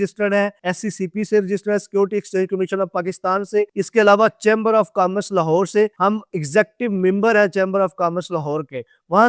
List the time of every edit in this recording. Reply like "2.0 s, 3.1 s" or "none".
none